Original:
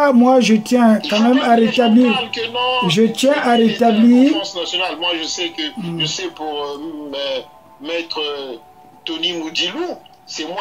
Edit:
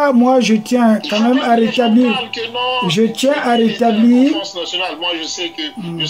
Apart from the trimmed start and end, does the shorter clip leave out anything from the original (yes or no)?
no